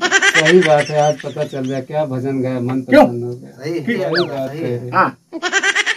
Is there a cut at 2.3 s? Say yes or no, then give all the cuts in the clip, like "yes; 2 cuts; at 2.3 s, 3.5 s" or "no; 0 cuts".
no; 1 cut; at 3.9 s